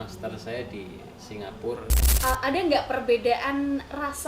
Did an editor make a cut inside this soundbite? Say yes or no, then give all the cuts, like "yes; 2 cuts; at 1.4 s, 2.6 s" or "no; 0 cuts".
yes; 1 cut; at 2.0 s